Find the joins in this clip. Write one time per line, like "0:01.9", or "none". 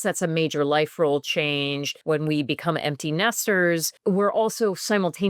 0:01.9
0:03.9